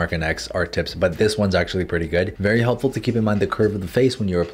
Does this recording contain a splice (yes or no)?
no